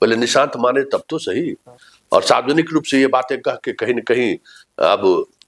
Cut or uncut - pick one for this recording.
uncut